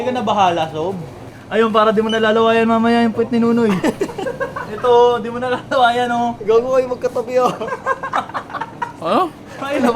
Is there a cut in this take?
yes; 1 cut; at 1.3 s

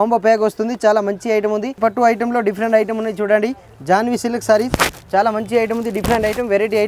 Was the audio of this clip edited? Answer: yes; 1 cut; at 1.8 s

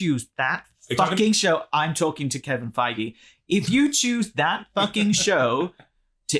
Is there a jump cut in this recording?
no; 0 cuts

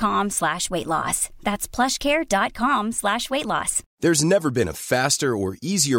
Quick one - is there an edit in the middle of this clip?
yes; 1 cut; at 3.8 s

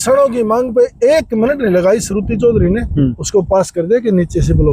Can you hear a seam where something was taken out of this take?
no; 0 cuts

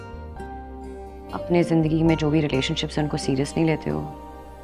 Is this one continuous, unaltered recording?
no; 1 cut; at 1.3 s

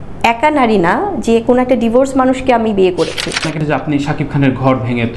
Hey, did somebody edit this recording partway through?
yes; 1 cut; at 3.5 s

